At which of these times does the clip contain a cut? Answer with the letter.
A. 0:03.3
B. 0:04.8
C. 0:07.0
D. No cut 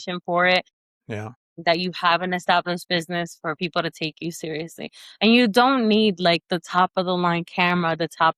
D